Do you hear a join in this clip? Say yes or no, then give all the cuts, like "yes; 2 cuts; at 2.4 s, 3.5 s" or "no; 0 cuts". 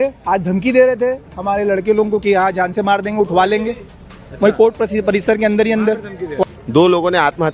yes; 1 cut; at 6.4 s